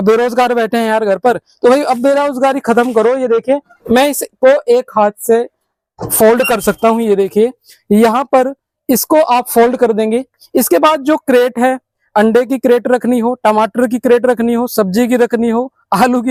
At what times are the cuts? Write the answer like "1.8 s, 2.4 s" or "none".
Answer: none